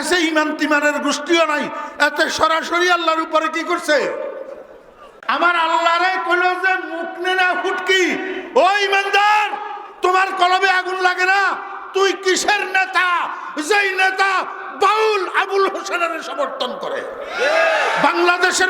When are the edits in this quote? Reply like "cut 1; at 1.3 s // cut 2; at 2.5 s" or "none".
cut 1; at 5.1 s

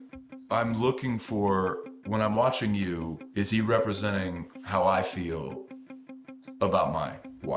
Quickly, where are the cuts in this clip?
none

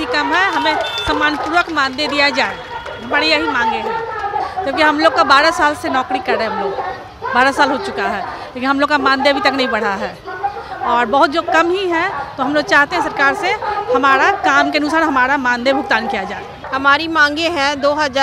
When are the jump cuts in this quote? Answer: none

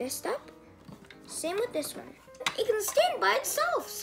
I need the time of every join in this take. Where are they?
cut 1; at 2.5 s

